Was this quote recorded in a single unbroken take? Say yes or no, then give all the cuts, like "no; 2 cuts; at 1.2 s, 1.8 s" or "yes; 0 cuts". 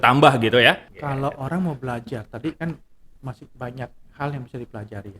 no; 1 cut; at 0.9 s